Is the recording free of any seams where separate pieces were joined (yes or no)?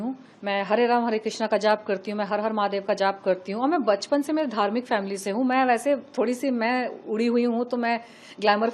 yes